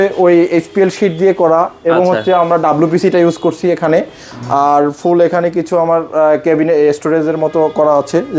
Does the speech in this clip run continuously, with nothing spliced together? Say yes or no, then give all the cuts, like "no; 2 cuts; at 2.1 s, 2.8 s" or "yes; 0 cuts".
yes; 0 cuts